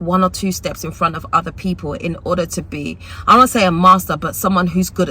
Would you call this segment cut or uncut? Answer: uncut